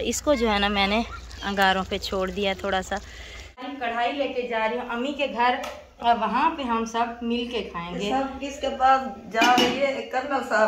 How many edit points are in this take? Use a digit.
1